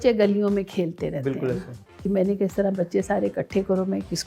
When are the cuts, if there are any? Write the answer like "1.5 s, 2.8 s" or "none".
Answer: 2.0 s

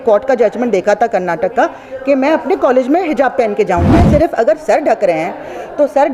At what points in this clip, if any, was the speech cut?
4.0 s

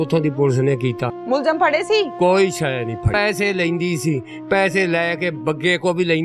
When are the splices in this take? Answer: 1.1 s, 3.1 s

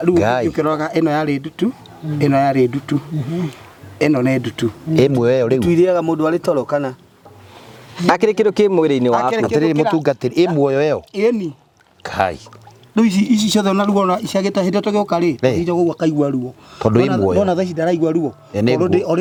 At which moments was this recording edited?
none

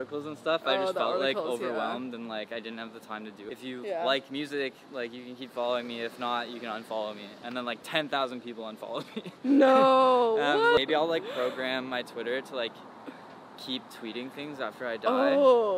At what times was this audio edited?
3.4 s, 10.8 s

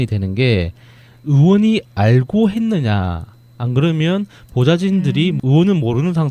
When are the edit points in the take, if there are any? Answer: 1.9 s

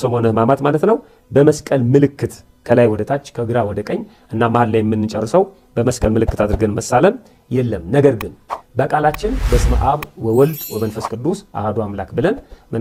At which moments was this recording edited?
none

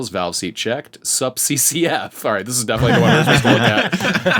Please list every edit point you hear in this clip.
none

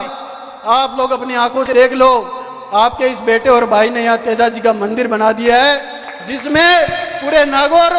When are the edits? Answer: 1.7 s

